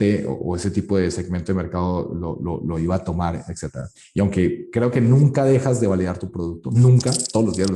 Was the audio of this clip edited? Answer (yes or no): no